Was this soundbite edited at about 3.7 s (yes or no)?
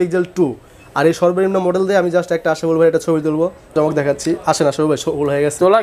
yes